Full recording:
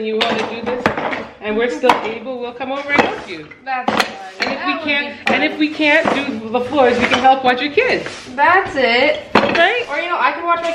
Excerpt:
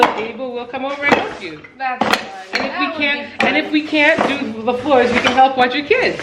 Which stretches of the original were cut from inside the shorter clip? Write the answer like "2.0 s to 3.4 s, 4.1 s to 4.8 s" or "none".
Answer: none